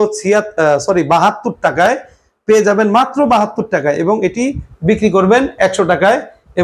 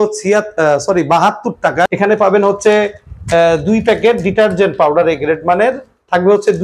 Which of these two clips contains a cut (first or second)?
second